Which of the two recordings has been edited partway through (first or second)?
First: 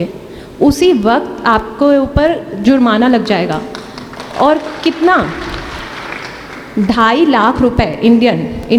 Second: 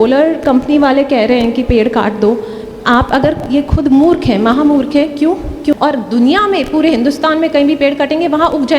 second